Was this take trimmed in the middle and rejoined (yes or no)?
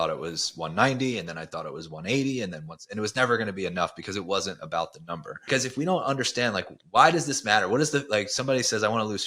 yes